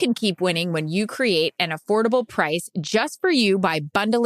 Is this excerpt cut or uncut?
uncut